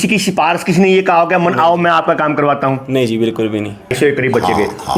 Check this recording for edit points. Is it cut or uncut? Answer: cut